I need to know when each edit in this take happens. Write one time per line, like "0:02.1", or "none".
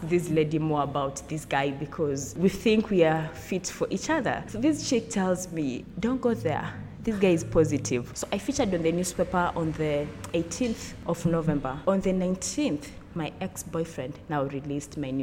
0:02.4
0:04.5
0:05.9
0:08.1
0:10.9
0:11.7